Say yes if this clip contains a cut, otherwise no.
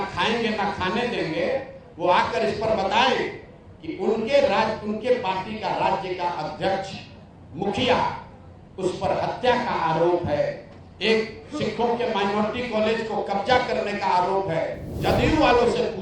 yes